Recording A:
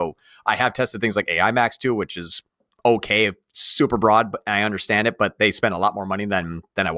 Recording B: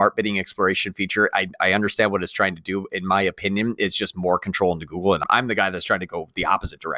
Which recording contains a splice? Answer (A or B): B